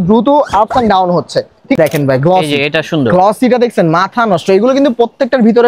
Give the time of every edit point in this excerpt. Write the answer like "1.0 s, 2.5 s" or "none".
1.8 s